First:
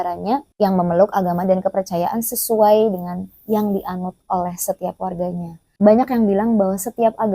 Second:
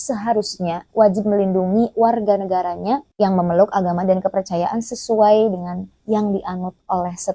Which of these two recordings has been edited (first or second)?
first